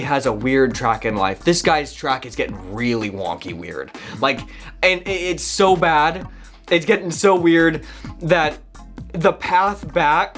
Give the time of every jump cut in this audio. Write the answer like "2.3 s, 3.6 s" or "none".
none